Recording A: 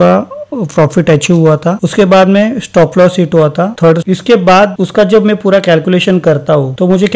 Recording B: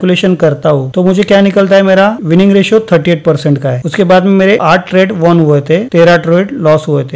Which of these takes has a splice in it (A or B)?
A